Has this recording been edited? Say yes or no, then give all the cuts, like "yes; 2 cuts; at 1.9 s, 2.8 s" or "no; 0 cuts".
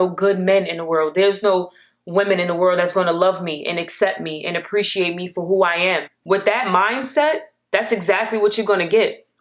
yes; 1 cut; at 6.1 s